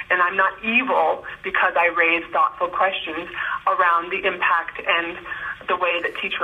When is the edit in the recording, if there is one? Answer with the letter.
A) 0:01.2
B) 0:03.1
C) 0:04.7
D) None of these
D